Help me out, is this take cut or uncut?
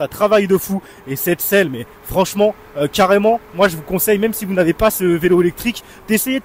uncut